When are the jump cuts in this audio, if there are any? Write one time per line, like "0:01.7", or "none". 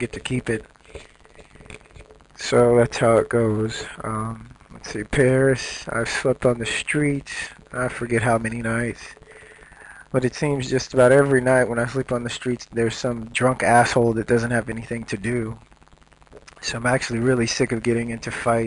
0:13.3